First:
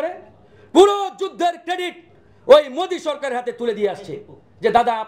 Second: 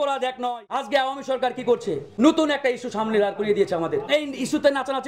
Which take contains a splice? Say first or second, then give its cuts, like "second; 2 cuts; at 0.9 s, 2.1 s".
second; 3 cuts; at 0.8 s, 2.0 s, 4.1 s